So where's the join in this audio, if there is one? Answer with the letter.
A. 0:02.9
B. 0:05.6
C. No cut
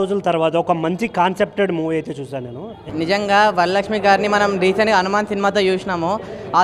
A